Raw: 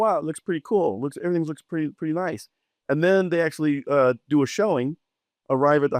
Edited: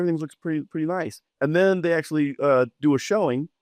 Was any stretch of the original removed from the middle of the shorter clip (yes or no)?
yes